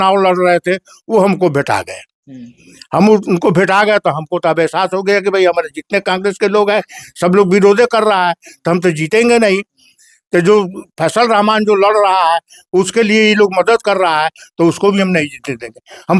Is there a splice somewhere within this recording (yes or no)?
no